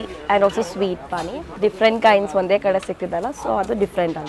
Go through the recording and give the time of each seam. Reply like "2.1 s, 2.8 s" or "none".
1.5 s